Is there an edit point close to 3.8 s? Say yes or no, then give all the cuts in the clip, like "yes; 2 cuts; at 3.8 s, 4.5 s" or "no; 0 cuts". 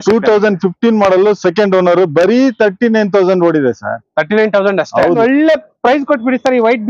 no; 1 cut; at 5.2 s